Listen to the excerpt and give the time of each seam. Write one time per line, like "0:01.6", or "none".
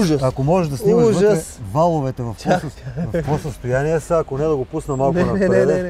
none